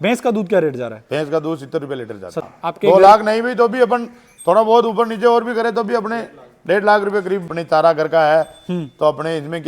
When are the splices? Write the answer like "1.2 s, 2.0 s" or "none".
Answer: 2.5 s, 7.5 s